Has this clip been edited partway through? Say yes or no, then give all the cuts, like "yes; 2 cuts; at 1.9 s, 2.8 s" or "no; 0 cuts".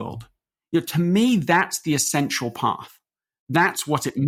no; 0 cuts